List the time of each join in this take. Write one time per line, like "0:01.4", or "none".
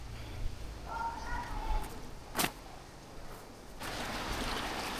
0:03.7